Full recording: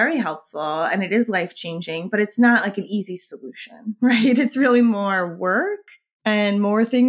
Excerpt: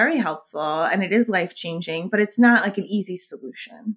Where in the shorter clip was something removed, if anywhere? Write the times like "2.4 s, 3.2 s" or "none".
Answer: none